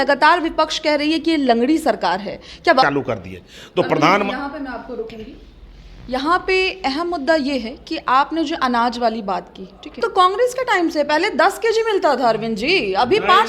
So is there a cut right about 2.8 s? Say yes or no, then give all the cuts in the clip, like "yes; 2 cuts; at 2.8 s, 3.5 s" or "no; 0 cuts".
yes; 1 cut; at 2.8 s